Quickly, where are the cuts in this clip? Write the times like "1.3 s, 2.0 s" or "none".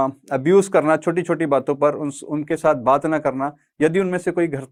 none